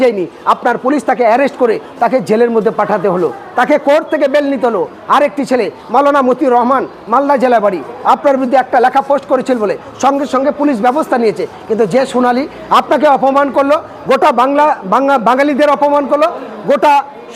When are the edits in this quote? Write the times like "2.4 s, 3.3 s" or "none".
none